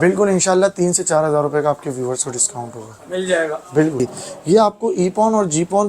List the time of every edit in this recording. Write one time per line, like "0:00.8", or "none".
0:04.0